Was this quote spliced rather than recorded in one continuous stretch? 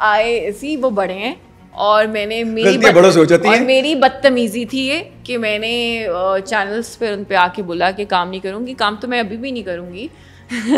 no; 0 cuts

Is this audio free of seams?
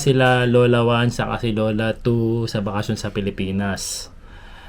yes; 0 cuts

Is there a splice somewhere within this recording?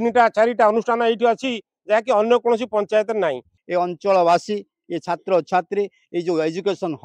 yes; 1 cut; at 3.5 s

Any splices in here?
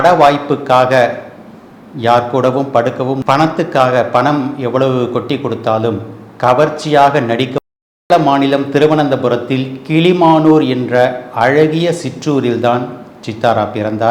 yes; 2 cuts; at 3.2 s, 8.1 s

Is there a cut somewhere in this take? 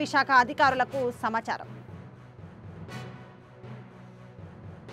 no; 0 cuts

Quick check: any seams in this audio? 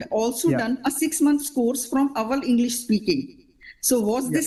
no; 0 cuts

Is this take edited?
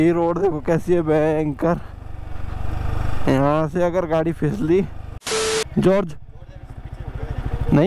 no; 0 cuts

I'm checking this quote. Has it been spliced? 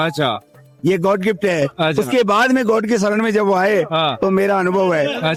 no; 0 cuts

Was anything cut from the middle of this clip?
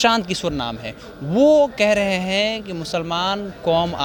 no; 0 cuts

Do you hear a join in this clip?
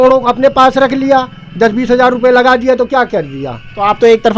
no; 0 cuts

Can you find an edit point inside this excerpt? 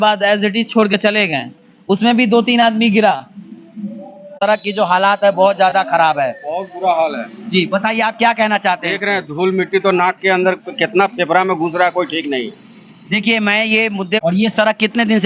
yes; 2 cuts; at 4.4 s, 14.2 s

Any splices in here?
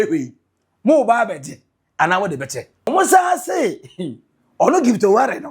yes; 1 cut; at 2.9 s

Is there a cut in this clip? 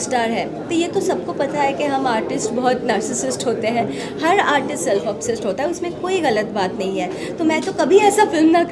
no; 0 cuts

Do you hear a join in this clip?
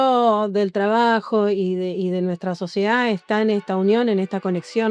no; 0 cuts

